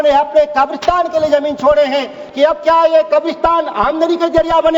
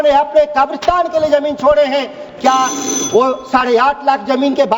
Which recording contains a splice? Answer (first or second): first